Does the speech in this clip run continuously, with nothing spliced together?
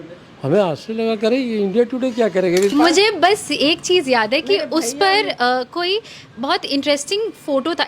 no; 1 cut; at 2.7 s

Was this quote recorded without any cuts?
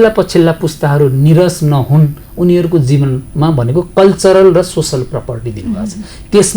yes; 0 cuts

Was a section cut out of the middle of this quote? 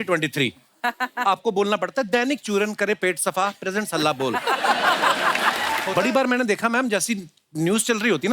yes; 1 cut; at 5.9 s

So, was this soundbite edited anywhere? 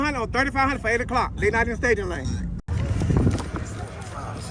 yes; 1 cut; at 2.7 s

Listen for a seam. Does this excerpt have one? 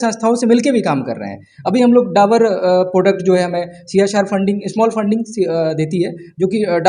no; 0 cuts

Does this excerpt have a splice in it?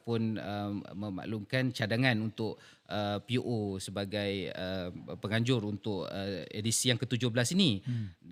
no; 0 cuts

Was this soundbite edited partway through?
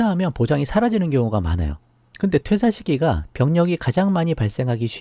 yes; 1 cut; at 2.4 s

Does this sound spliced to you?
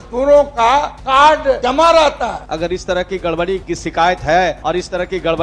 yes; 5 cuts; at 1.0 s, 1.6 s, 2.4 s, 3.6 s, 4.6 s

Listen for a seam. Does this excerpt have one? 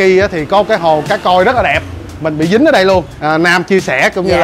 yes; 1 cut; at 3.1 s

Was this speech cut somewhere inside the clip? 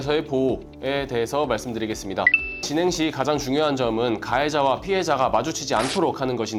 no; 0 cuts

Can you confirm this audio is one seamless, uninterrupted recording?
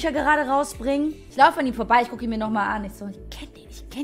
no; 1 cut; at 1.2 s

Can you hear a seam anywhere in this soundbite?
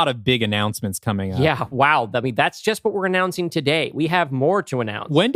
no; 0 cuts

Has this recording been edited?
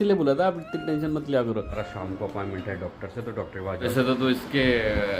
yes; 2 cuts; at 1.8 s, 3.9 s

